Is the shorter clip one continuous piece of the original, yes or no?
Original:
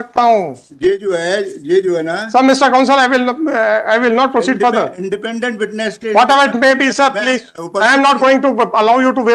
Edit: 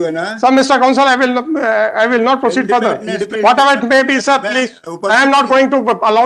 no